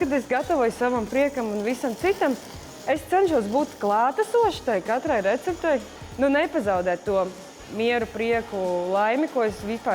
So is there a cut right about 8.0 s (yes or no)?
no